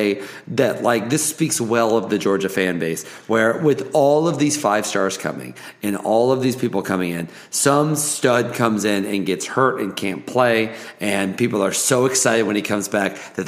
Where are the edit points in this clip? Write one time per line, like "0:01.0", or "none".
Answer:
none